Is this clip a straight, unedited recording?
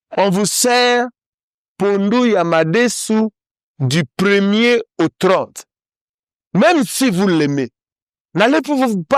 yes; 0 cuts

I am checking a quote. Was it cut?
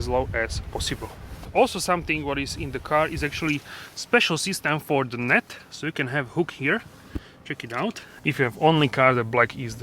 yes; 2 cuts; at 1.4 s, 8.1 s

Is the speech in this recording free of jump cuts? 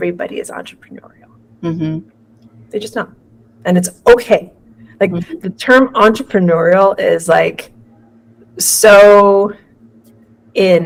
yes; 0 cuts

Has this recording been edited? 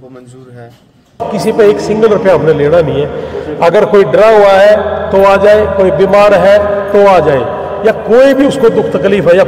yes; 1 cut; at 1.2 s

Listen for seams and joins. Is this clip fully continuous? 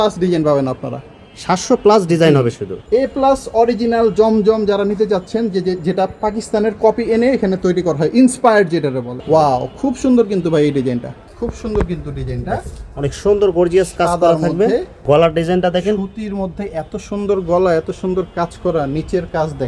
no; 4 cuts; at 2.7 s, 9.1 s, 11.2 s, 15.0 s

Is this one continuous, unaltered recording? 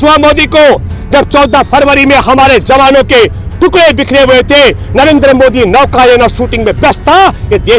yes; 0 cuts

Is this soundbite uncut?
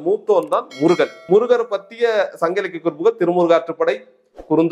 no; 1 cut; at 1.2 s

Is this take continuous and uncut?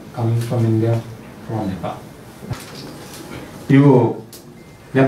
no; 1 cut; at 2.7 s

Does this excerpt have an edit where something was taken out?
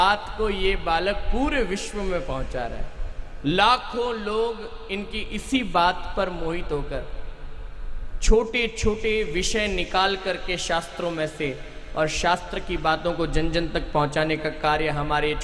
no; 0 cuts

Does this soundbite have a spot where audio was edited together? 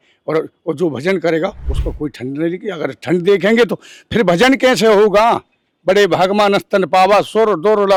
no; 0 cuts

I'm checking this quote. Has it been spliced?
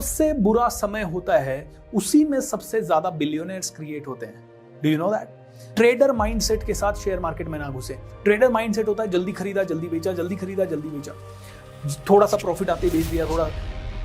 yes; 1 cut; at 5.7 s

